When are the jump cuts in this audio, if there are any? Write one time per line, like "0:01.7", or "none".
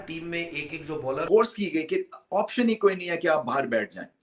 0:01.3